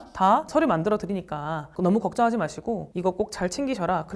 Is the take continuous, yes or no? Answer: no